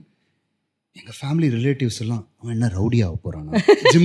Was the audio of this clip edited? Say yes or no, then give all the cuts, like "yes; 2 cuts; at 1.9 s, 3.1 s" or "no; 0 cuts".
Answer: no; 0 cuts